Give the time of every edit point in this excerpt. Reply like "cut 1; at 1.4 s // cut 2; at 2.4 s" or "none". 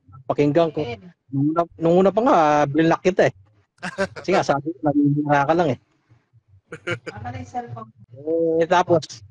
cut 1; at 8.0 s